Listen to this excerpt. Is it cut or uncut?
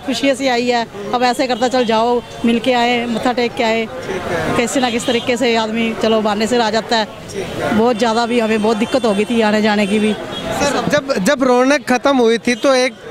uncut